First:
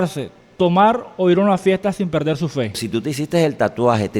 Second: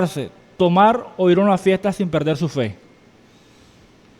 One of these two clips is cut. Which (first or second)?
first